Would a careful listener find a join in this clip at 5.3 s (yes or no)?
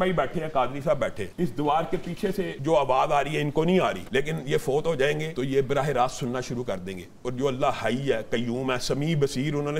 yes